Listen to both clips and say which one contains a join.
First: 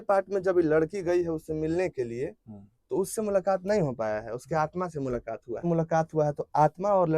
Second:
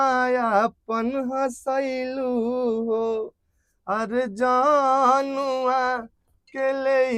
first; 1 cut; at 5.6 s

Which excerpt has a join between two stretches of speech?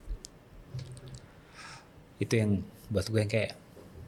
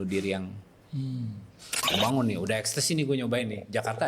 second; 1 cut; at 1.9 s

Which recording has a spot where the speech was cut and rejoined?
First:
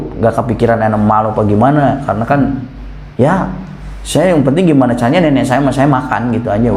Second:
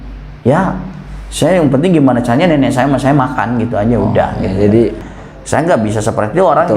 second; 1 cut; at 5.0 s

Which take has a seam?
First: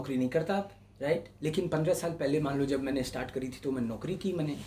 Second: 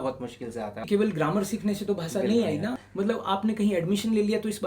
second; 2 cuts; at 0.9 s, 2.8 s

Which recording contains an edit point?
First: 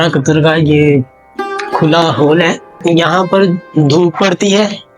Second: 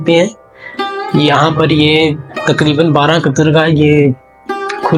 first; 1 cut; at 2.8 s

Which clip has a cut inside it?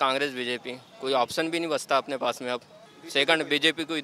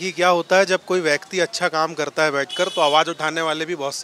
first; 1 cut; at 2.8 s

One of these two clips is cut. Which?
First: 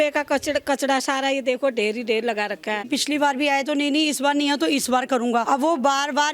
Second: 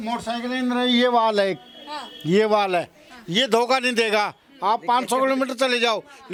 first; 2 cuts; at 2.9 s, 5.4 s

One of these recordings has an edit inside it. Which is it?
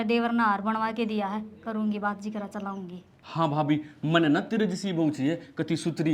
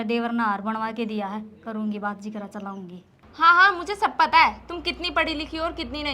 second; 1 cut; at 3.2 s

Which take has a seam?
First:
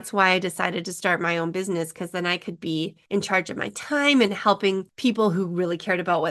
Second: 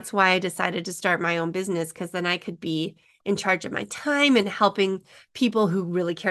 first; 2 cuts; at 3.0 s, 4.9 s

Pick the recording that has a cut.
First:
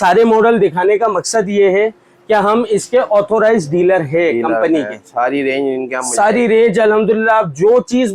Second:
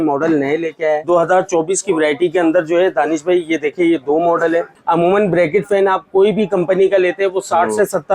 second; 2 cuts; at 1.1 s, 4.8 s

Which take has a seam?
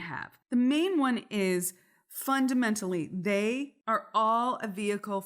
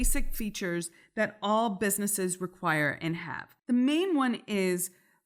first; 1 cut; at 3.8 s

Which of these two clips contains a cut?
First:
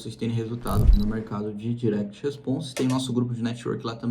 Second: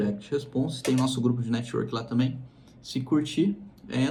first; 1 cut; at 0.9 s

